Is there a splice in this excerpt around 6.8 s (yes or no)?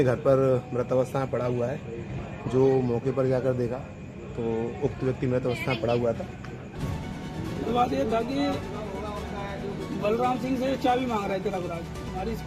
yes